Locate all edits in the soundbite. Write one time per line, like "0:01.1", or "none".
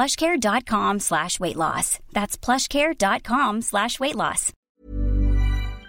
0:04.6